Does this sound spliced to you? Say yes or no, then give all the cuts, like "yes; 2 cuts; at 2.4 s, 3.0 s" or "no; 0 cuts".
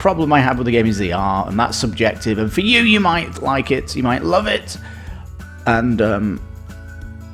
no; 0 cuts